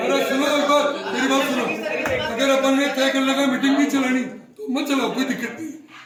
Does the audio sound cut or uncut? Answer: uncut